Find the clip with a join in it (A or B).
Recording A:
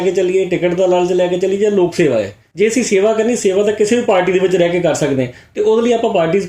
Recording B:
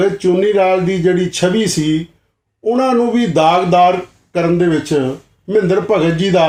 A